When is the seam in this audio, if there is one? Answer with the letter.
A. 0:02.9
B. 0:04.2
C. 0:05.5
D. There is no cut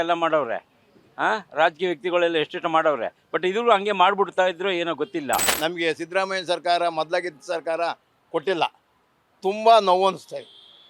C